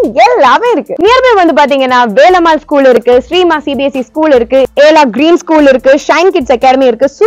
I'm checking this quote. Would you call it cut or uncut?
uncut